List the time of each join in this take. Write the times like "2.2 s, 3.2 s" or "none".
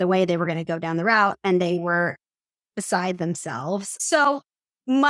3.9 s